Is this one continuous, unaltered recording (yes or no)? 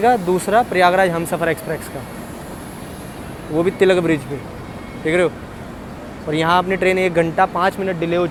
yes